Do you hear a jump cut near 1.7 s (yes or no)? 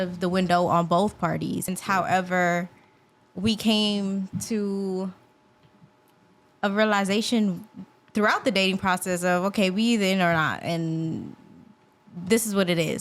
yes